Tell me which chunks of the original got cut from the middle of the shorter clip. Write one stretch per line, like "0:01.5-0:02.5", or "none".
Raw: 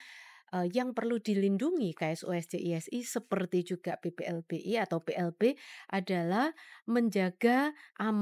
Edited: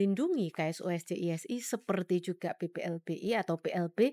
none